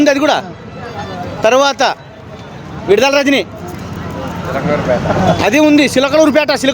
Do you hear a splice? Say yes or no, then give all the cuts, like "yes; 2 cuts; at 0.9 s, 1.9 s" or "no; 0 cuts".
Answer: no; 0 cuts